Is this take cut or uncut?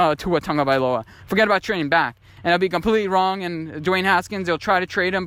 uncut